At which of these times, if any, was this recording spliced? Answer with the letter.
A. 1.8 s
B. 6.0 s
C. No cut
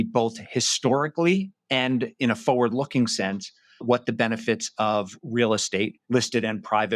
B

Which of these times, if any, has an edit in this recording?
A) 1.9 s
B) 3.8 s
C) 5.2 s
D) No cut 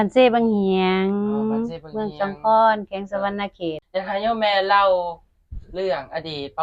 B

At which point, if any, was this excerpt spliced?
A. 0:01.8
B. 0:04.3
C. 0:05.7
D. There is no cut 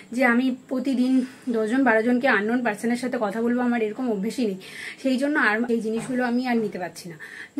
C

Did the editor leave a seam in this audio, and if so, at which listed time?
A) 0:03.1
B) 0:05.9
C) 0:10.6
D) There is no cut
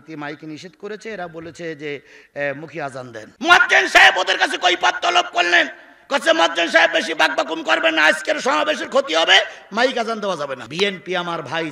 C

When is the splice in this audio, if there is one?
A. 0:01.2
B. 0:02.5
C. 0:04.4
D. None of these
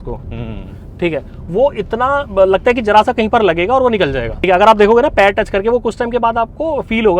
C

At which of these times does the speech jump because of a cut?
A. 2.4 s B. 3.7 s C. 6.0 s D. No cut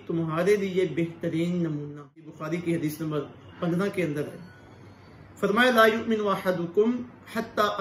A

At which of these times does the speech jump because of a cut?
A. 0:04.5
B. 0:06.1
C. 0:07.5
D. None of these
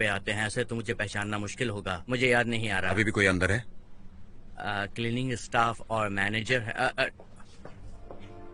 D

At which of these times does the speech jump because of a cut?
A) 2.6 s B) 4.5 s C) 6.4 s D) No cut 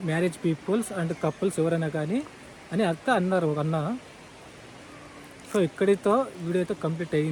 D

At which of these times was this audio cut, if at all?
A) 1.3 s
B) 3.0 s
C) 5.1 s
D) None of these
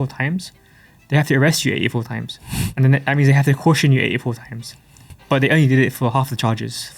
C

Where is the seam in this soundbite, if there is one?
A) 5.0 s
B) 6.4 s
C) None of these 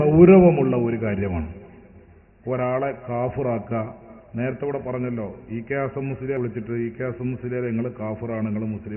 B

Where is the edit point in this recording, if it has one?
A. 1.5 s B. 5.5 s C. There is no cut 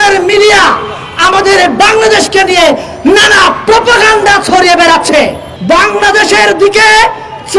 B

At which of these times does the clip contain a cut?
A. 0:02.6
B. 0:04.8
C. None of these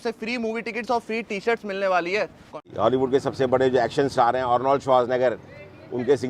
A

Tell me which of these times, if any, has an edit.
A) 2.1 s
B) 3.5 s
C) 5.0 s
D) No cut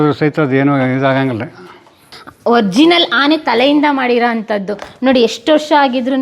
A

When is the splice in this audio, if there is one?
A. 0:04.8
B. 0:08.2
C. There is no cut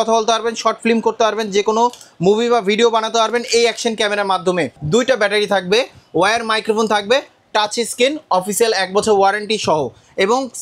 A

